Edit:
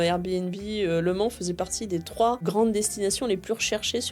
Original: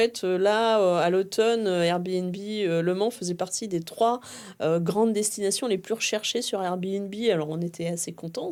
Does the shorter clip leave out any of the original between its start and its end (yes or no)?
yes